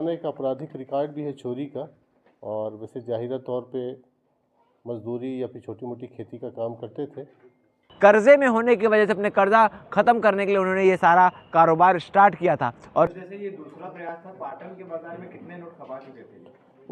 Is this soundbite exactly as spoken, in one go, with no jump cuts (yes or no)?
no